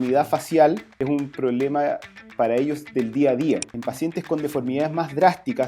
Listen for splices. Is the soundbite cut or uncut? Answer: cut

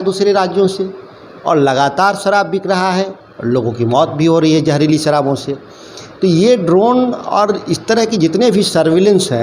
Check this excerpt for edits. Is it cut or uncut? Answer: uncut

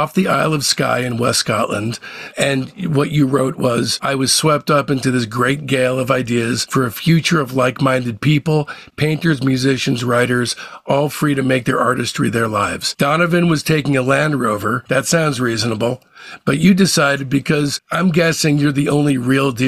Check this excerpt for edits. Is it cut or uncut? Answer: uncut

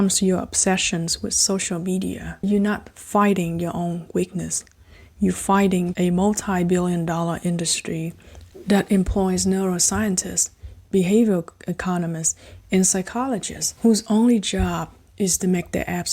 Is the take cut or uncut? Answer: cut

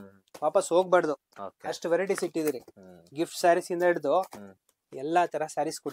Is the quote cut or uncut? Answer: uncut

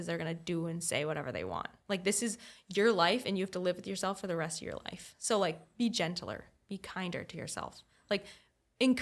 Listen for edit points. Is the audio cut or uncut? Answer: uncut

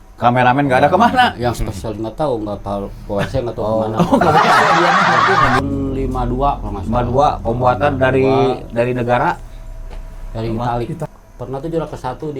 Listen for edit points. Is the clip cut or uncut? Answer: cut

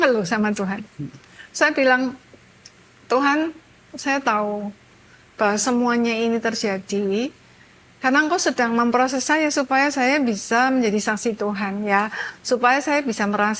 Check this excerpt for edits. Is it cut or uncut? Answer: uncut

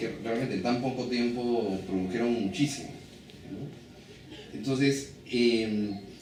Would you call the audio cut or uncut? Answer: uncut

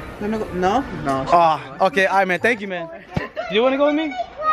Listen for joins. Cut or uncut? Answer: uncut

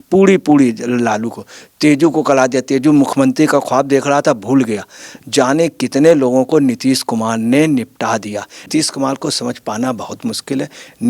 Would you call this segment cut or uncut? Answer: cut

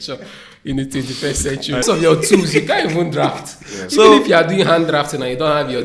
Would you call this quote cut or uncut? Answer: cut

